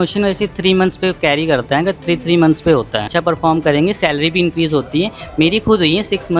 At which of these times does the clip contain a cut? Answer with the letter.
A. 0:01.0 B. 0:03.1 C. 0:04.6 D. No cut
B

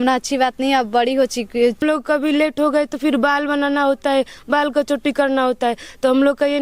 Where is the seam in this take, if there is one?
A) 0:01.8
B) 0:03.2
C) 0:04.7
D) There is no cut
A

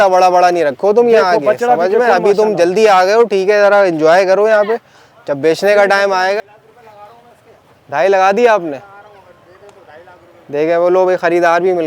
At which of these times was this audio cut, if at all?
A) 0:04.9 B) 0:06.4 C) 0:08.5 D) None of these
B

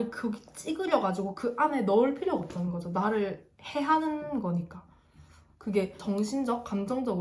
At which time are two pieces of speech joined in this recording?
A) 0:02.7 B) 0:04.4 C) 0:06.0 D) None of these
C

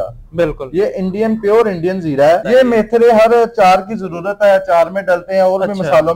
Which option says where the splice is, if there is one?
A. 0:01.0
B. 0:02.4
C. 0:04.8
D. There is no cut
B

